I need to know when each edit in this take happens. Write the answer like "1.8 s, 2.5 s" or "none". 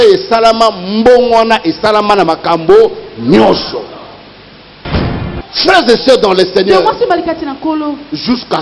5.1 s